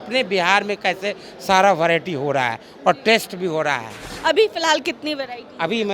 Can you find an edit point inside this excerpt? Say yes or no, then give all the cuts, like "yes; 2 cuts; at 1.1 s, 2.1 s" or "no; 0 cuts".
yes; 1 cut; at 4.1 s